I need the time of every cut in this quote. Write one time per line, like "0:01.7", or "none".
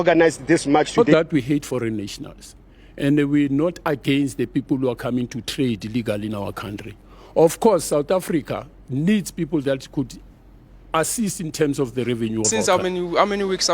0:00.9
0:12.7